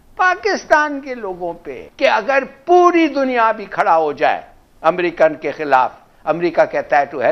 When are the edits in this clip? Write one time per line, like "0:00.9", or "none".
0:01.8